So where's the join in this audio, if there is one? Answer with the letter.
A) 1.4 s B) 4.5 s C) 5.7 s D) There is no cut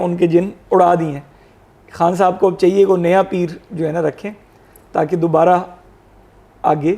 D